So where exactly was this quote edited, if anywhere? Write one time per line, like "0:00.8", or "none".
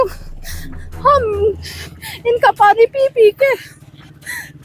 none